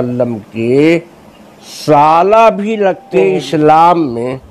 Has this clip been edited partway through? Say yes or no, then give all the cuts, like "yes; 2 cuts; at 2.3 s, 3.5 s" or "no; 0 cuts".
yes; 1 cut; at 3.0 s